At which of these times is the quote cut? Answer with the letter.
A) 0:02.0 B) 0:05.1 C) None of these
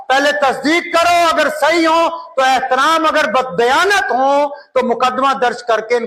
C